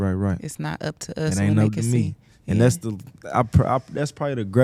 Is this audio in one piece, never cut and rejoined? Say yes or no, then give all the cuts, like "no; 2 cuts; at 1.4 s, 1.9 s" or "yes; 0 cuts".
yes; 0 cuts